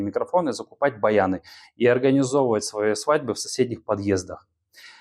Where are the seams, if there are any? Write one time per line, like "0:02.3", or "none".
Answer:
none